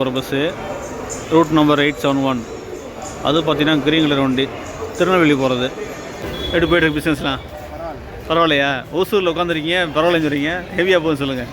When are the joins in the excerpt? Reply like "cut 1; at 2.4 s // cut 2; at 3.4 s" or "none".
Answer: cut 1; at 6.2 s

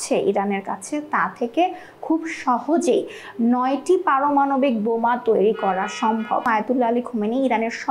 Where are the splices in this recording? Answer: cut 1; at 6.5 s

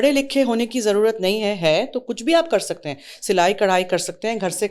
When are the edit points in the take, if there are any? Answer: none

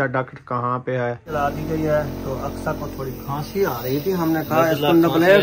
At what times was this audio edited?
cut 1; at 1.2 s

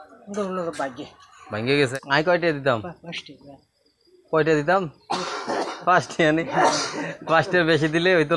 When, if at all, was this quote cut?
cut 1; at 1.8 s

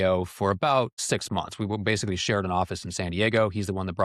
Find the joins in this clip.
cut 1; at 1.0 s

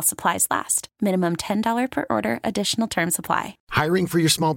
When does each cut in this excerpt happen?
cut 1; at 3.6 s

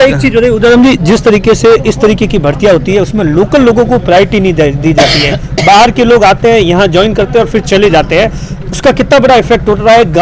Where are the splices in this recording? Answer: none

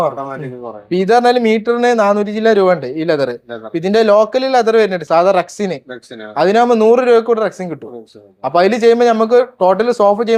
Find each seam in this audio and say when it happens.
none

